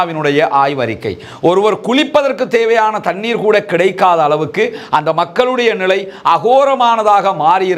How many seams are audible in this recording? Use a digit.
0